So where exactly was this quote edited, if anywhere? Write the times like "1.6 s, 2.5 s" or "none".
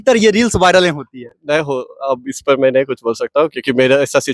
none